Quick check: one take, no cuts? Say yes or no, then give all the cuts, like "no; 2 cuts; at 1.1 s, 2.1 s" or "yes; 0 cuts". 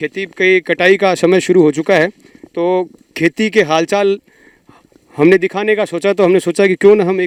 yes; 0 cuts